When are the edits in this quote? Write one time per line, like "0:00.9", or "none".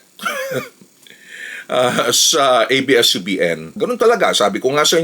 0:03.7